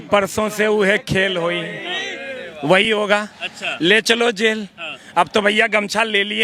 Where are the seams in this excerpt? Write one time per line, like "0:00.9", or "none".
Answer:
none